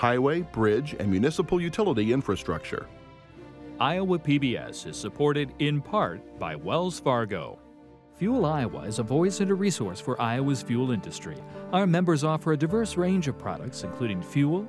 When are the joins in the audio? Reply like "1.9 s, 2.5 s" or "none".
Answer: none